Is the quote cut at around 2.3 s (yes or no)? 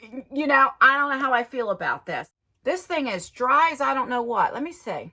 yes